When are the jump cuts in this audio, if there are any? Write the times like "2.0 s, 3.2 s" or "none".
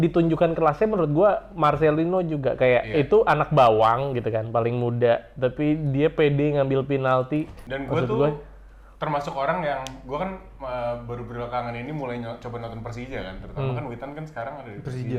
7.6 s